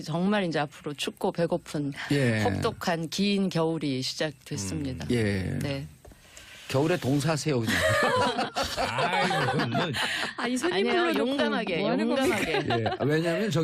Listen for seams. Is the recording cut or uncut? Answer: cut